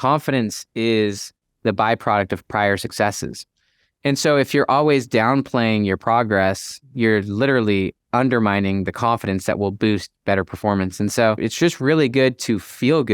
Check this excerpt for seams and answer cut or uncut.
cut